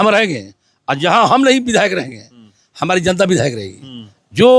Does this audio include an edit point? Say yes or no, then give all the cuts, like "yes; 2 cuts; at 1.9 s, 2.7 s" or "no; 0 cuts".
no; 0 cuts